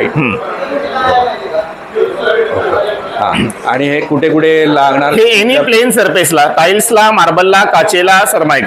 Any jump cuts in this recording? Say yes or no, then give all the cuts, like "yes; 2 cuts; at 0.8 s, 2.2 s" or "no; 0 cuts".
no; 0 cuts